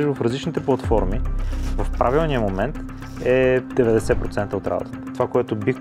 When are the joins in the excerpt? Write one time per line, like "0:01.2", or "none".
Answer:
none